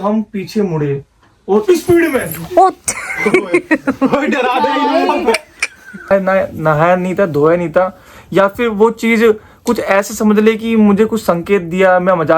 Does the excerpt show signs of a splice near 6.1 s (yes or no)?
yes